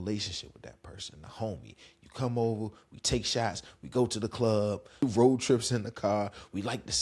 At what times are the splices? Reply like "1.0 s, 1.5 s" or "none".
5.0 s